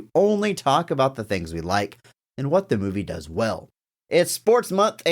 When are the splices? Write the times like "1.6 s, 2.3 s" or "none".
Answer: 3.7 s